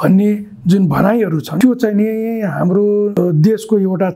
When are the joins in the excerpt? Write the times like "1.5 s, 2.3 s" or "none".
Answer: 1.5 s, 3.1 s